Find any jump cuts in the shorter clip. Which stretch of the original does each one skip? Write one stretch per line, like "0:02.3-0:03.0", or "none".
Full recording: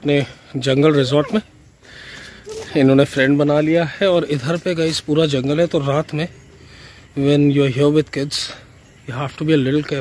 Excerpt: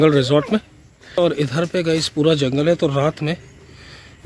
0:02.0-0:04.1